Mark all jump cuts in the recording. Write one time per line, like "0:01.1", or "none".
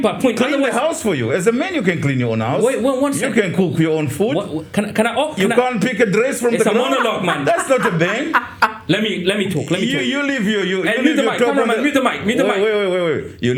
none